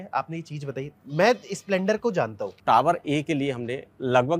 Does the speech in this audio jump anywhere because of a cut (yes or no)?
yes